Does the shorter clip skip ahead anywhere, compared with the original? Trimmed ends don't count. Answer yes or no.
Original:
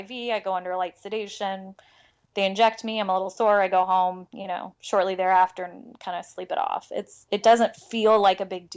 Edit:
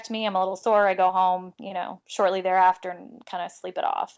no